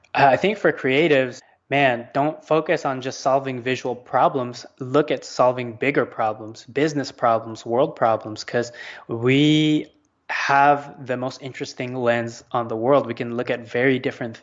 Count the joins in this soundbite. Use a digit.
1